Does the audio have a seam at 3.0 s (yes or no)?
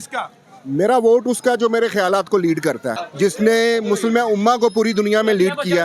yes